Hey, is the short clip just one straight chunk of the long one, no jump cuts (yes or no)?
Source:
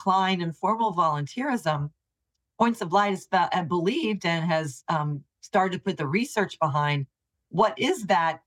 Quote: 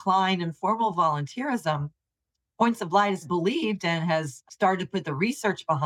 no